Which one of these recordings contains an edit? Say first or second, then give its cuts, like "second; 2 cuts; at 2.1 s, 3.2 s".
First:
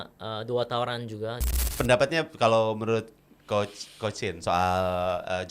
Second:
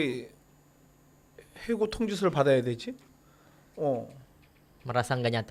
first; 1 cut; at 1.6 s